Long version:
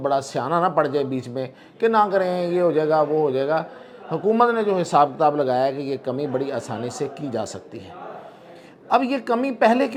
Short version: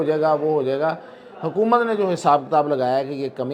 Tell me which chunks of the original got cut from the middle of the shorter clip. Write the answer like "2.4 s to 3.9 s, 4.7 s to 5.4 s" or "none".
none